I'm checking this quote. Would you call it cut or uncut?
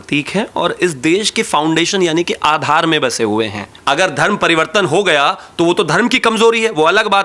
cut